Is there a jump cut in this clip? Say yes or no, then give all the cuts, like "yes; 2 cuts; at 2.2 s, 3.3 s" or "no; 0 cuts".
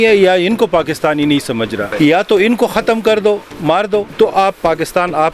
yes; 2 cuts; at 1.9 s, 4.1 s